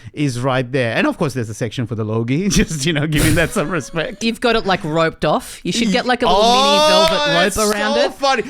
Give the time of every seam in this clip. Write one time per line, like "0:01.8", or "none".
0:04.2